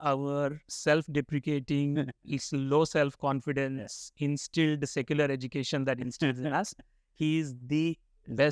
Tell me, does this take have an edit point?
no; 0 cuts

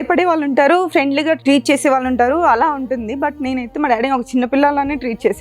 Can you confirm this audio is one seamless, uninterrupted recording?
no; 1 cut; at 1.4 s

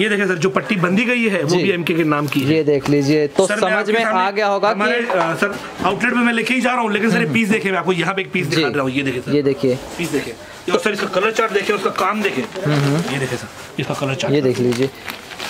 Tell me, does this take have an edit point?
no; 0 cuts

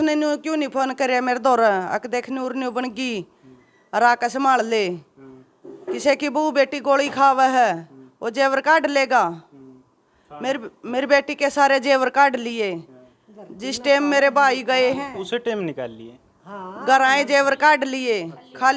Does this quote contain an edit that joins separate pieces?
no; 0 cuts

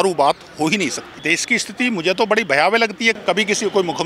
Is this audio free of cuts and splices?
no; 2 cuts; at 1.2 s, 3.2 s

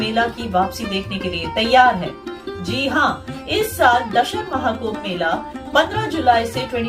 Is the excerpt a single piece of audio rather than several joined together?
yes; 0 cuts

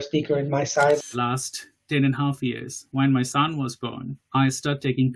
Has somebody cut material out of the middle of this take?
yes; 1 cut; at 1.0 s

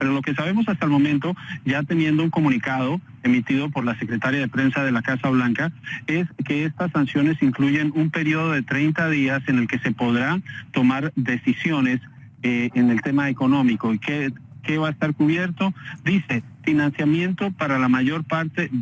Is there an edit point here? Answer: no; 0 cuts

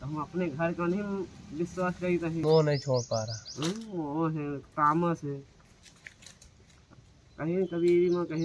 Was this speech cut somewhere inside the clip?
yes; 1 cut; at 2.4 s

